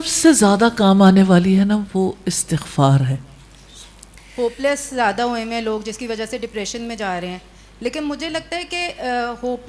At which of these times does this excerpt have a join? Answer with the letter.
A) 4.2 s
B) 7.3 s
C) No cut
A